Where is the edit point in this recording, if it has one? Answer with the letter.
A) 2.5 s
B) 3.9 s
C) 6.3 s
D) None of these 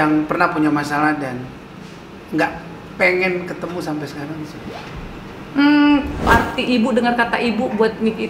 C